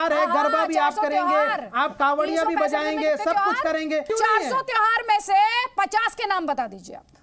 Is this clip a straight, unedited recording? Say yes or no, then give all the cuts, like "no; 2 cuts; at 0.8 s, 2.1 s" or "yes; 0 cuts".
no; 1 cut; at 4.1 s